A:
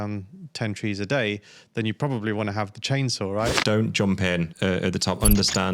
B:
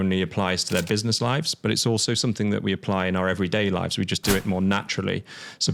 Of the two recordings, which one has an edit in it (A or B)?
A